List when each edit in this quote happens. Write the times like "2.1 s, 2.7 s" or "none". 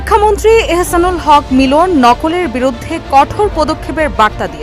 none